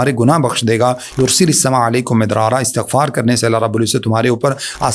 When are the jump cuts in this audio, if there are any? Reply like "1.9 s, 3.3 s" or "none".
none